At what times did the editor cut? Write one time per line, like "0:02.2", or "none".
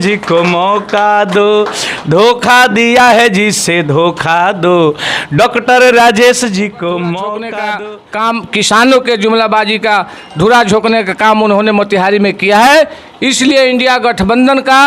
0:07.6